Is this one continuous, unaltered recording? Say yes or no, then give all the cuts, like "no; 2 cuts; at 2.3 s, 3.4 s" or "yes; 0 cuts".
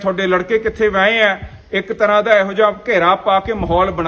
yes; 0 cuts